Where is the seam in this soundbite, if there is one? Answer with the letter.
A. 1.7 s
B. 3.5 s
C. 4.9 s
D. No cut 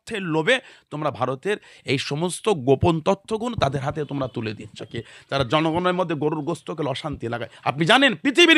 C